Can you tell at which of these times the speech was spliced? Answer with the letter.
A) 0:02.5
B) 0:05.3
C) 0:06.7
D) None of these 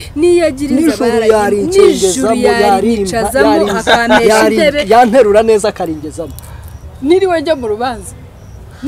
D